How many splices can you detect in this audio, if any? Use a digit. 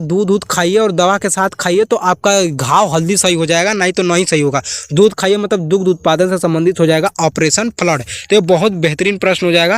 0